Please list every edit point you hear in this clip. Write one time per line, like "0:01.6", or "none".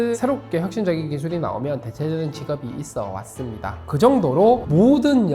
0:03.8